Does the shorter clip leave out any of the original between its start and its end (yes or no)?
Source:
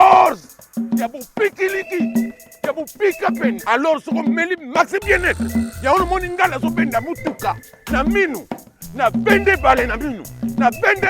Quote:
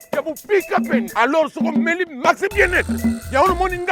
no